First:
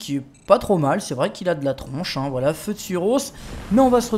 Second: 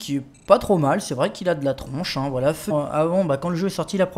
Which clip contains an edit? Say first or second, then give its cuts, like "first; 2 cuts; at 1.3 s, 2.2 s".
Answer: first; 1 cut; at 2.7 s